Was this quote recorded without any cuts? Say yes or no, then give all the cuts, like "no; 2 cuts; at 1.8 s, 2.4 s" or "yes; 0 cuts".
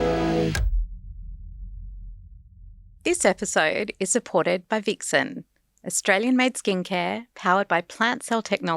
no; 1 cut; at 3.0 s